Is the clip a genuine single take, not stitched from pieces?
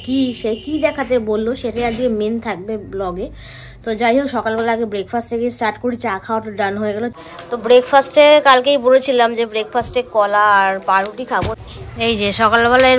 no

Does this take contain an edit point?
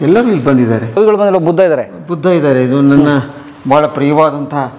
yes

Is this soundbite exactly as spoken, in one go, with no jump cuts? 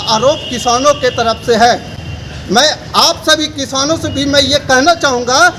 yes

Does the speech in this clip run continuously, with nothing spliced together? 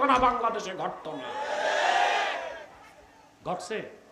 yes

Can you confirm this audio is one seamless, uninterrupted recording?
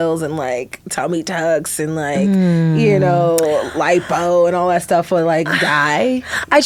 yes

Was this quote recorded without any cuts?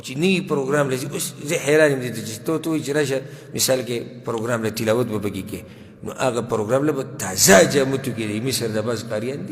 yes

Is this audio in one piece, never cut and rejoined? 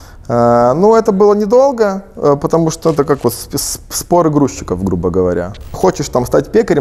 no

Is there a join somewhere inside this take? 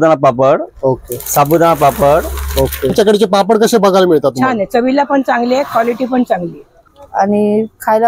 yes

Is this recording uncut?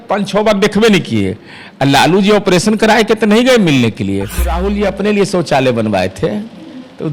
no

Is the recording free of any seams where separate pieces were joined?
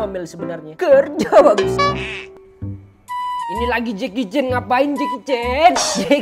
yes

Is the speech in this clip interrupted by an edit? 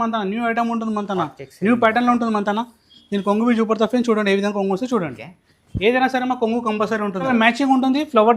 yes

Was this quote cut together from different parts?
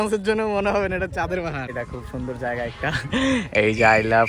yes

